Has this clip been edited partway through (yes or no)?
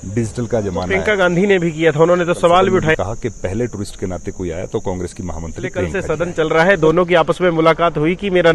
yes